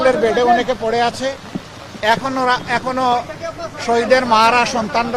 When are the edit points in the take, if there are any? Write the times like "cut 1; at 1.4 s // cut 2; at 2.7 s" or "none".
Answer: none